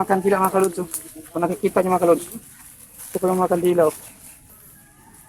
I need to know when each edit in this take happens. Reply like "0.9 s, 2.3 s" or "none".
none